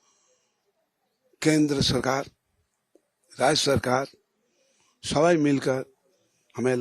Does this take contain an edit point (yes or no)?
no